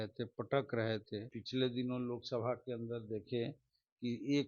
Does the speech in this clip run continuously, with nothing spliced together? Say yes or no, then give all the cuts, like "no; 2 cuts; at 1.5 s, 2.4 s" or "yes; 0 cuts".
no; 1 cut; at 1.4 s